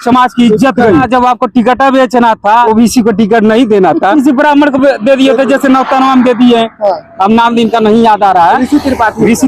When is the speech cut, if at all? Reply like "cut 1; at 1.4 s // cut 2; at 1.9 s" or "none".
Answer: cut 1; at 1.1 s // cut 2; at 2.7 s // cut 3; at 4.1 s